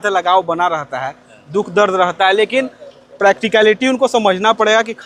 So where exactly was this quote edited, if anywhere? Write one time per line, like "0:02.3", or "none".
none